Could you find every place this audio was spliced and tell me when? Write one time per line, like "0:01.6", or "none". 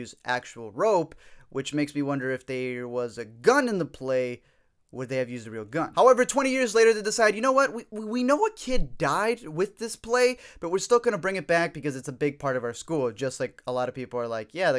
0:01.5